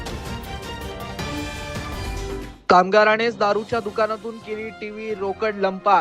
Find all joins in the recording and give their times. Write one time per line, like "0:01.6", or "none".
0:02.2